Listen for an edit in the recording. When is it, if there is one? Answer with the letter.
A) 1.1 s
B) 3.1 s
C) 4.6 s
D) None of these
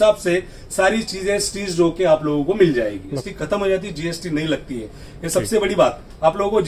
B